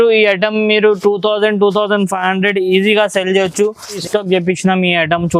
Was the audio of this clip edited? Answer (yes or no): yes